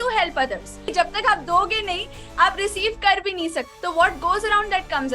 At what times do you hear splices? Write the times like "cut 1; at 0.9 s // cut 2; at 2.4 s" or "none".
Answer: cut 1; at 0.9 s // cut 2; at 3.7 s